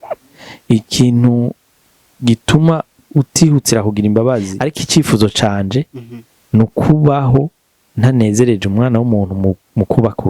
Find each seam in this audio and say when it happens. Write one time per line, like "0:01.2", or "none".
0:04.7